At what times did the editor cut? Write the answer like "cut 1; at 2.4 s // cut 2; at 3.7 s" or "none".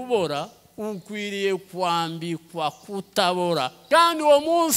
cut 1; at 3.8 s